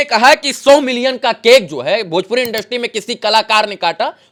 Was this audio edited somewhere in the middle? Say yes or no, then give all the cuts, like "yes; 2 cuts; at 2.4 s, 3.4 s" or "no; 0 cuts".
no; 0 cuts